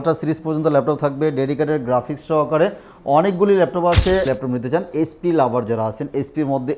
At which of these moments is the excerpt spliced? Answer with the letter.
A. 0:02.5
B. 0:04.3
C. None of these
B